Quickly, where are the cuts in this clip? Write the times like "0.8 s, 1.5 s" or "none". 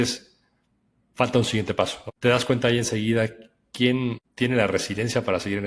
none